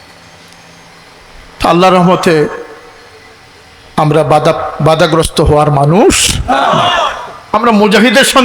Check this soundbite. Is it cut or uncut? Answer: uncut